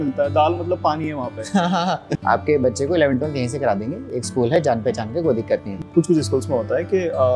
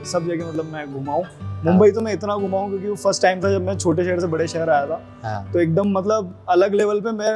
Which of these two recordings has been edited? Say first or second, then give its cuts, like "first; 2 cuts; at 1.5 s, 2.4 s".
first; 2 cuts; at 2.1 s, 5.7 s